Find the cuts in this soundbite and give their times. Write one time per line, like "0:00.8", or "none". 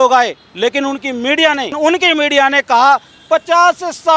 0:01.7